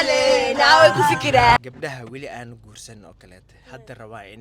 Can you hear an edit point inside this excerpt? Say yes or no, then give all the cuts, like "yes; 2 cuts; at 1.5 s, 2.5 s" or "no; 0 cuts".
yes; 1 cut; at 1.6 s